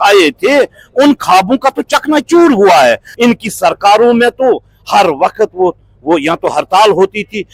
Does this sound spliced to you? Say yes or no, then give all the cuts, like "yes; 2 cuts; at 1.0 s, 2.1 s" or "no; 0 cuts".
yes; 1 cut; at 3.1 s